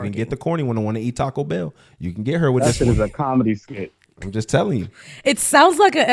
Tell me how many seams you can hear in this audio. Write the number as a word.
zero